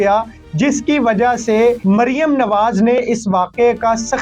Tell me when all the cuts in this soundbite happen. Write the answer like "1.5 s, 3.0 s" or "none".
1.8 s